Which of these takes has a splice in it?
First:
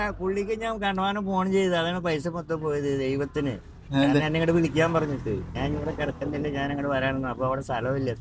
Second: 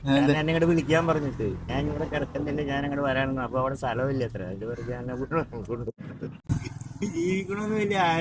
second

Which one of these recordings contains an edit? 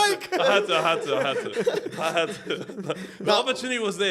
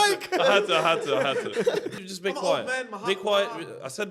second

